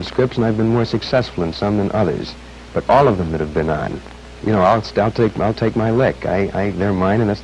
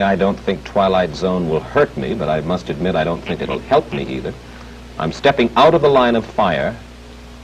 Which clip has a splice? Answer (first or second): second